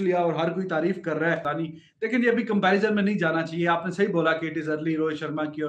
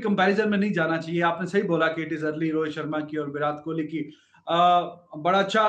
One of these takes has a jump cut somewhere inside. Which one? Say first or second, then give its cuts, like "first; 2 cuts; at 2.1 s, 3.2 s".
first; 1 cut; at 1.4 s